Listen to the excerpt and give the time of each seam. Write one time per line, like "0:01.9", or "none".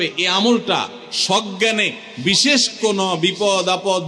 none